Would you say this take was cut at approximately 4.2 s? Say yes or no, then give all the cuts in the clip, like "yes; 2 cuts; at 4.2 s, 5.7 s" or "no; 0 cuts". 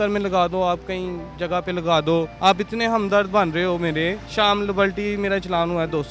yes; 2 cuts; at 2.3 s, 4.2 s